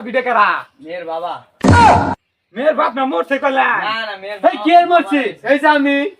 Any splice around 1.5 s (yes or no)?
yes